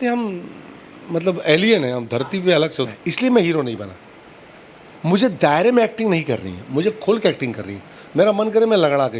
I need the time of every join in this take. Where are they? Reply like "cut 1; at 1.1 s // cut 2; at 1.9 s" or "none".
cut 1; at 2.9 s